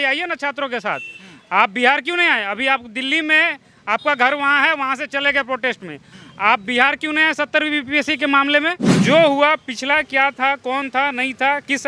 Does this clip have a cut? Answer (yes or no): yes